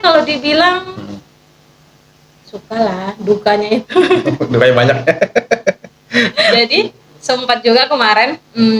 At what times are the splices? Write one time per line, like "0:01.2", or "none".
0:06.5